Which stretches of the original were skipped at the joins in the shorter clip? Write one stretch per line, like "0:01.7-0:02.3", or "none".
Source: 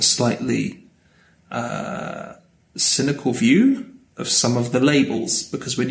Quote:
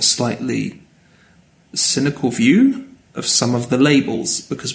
0:01.3-0:02.4